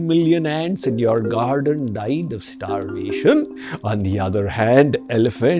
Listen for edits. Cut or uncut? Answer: cut